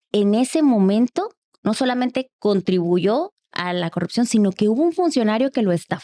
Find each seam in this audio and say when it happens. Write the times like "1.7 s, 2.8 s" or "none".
none